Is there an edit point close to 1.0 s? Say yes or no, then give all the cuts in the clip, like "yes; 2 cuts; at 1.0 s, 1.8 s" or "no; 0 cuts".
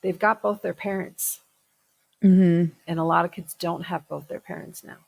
no; 1 cut; at 2.8 s